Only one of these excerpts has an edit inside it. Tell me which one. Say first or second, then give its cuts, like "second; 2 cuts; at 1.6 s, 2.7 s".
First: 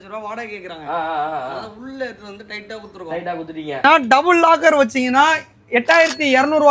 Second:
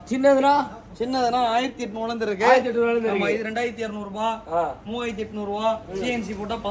first; 1 cut; at 3.8 s